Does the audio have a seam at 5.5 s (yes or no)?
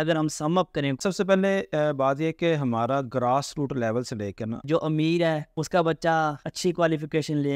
yes